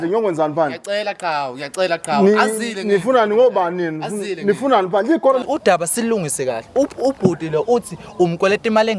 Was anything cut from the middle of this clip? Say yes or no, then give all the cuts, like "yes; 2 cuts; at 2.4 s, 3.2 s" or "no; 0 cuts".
yes; 1 cut; at 5.4 s